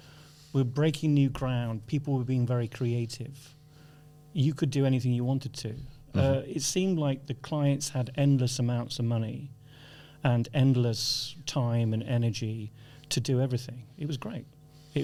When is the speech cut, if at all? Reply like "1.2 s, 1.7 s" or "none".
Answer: none